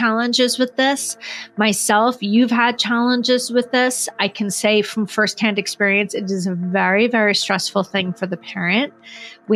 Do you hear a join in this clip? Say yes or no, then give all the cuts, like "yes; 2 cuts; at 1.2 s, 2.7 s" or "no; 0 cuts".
no; 0 cuts